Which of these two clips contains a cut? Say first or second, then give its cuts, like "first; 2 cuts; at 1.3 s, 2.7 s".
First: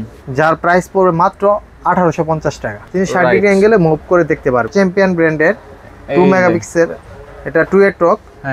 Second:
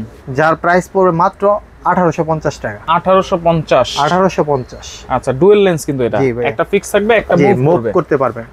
first; 2 cuts; at 2.7 s, 4.7 s